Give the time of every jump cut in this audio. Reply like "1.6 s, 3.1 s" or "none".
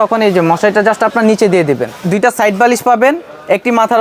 1.9 s